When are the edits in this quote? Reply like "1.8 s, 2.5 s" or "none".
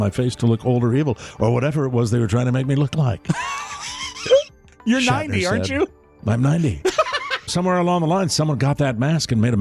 7.5 s